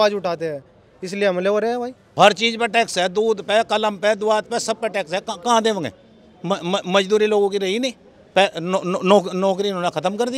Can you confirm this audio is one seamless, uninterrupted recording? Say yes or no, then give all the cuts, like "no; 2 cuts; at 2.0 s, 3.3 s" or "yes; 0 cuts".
no; 1 cut; at 2.0 s